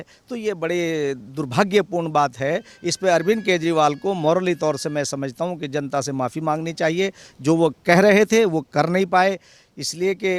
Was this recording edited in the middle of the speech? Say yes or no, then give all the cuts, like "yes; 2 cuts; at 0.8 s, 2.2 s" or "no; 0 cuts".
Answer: no; 0 cuts